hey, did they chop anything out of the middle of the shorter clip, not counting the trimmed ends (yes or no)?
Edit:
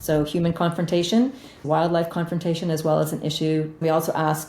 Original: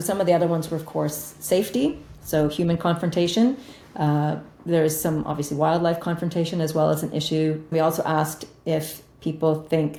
yes